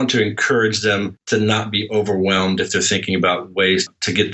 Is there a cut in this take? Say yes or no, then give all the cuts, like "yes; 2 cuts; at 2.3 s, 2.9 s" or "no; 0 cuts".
yes; 1 cut; at 1.2 s